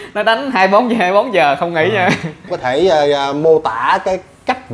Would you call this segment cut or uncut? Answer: cut